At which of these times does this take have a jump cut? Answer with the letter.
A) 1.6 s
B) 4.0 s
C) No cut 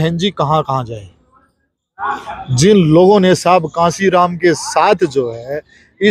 C